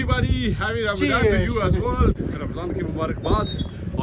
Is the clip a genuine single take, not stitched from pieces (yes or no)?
no